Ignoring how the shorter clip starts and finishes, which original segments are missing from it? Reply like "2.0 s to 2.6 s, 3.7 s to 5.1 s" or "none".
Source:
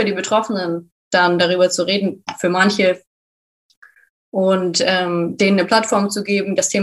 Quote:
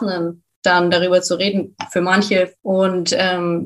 3.0 s to 4.2 s